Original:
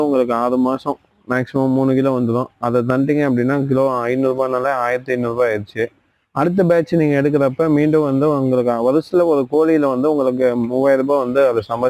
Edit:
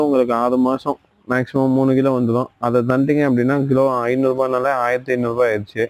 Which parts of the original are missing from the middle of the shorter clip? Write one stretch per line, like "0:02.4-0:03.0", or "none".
none